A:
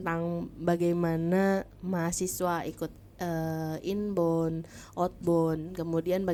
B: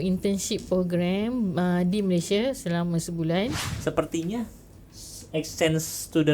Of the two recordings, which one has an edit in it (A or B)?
B